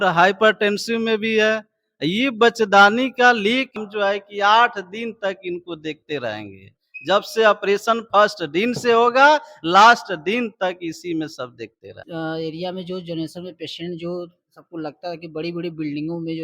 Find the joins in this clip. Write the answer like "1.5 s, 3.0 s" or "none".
3.8 s, 12.0 s

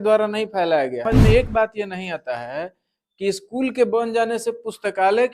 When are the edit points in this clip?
1.2 s

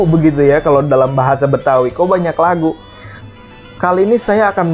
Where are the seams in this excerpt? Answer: 3.2 s

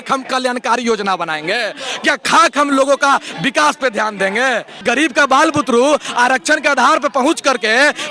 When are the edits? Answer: 4.8 s

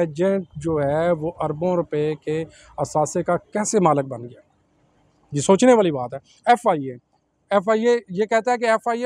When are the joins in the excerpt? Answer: none

